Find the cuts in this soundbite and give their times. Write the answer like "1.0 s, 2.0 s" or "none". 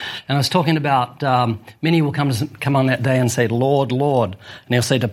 none